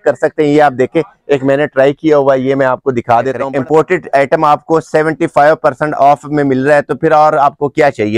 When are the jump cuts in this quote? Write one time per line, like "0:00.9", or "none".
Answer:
0:03.4